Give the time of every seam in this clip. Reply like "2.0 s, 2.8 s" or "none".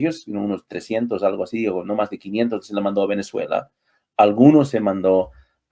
none

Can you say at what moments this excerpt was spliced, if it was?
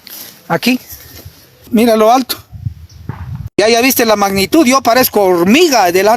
1.6 s

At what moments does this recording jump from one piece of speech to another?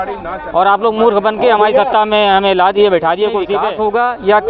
3.6 s

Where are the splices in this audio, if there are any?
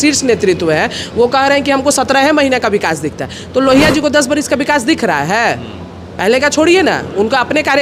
none

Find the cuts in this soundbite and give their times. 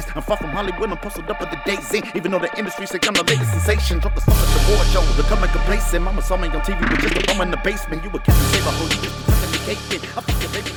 none

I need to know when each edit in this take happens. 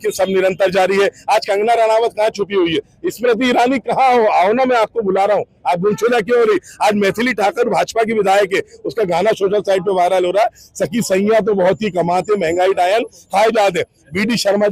none

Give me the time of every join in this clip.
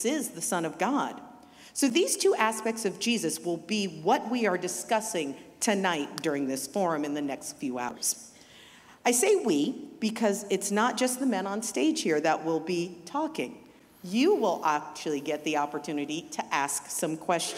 8.0 s

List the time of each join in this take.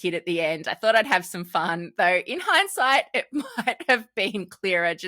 1.8 s

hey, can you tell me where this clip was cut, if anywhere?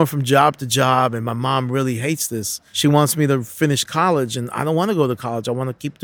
2.6 s

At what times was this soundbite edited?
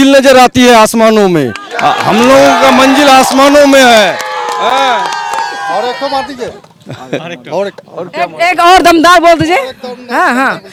none

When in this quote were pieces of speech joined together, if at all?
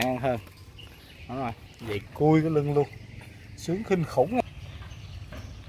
4.4 s

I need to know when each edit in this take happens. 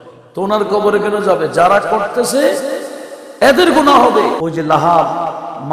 4.4 s

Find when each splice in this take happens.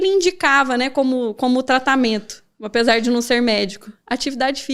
none

